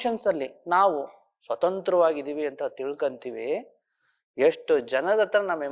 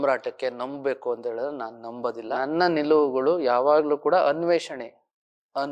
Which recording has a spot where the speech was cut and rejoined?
second; 1 cut; at 2.3 s

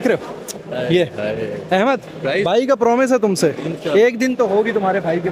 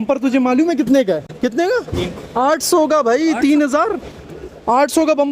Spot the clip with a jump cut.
second; 1 cut; at 1.3 s

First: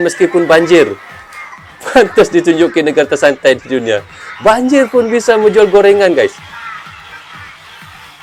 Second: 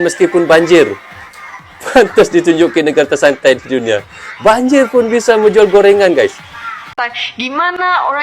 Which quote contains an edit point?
second; 1 cut; at 6.9 s

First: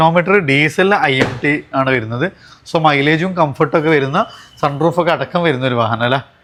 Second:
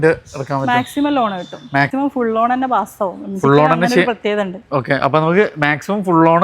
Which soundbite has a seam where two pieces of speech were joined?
second; 1 cut; at 1.9 s

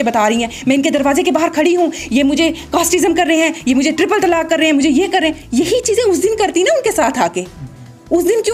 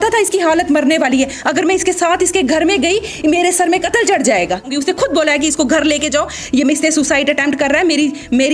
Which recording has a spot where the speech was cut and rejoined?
second; 1 cut; at 4.8 s

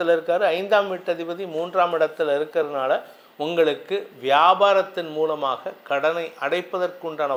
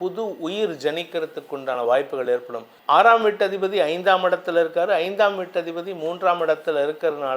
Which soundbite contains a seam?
second; 1 cut; at 2.8 s

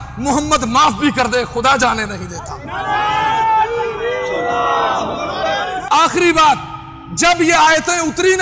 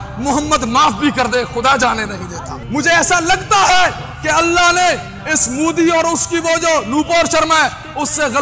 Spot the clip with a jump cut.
second; 1 cut; at 2.6 s

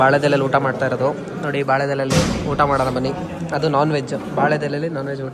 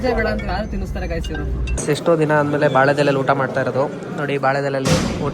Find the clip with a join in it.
second; 1 cut; at 1.7 s

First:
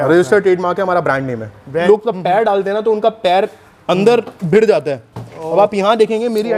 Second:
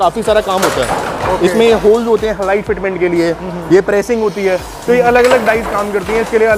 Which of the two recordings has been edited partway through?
first; 1 cut; at 1.8 s

